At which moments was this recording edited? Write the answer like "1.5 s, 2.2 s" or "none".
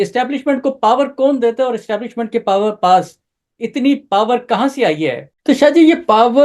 5.3 s